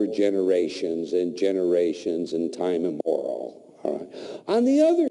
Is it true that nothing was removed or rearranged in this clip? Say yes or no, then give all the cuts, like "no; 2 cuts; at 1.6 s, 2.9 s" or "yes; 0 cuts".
no; 1 cut; at 2.9 s